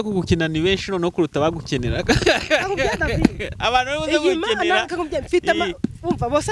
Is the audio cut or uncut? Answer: uncut